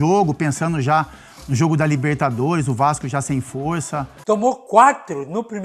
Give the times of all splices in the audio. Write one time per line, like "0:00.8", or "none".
0:04.1